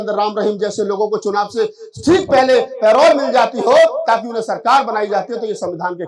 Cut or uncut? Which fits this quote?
uncut